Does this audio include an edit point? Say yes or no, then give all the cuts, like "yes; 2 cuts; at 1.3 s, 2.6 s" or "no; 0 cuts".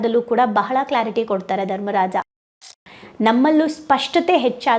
yes; 1 cut; at 2.6 s